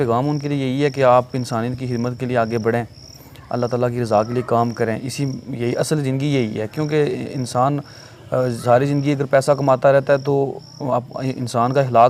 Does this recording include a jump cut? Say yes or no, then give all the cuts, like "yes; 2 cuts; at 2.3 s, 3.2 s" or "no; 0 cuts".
no; 0 cuts